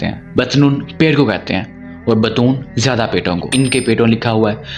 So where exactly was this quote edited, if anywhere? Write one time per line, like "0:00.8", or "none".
0:03.5